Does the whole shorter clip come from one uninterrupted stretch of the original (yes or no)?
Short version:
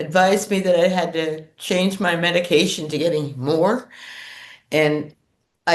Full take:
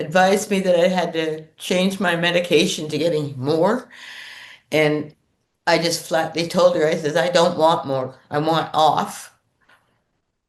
yes